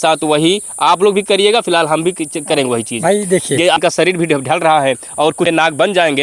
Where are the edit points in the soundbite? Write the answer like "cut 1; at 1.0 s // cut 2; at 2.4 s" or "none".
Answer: cut 1; at 3.8 s // cut 2; at 5.5 s